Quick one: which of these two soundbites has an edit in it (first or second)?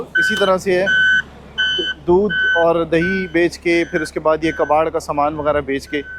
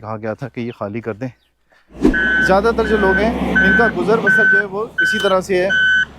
second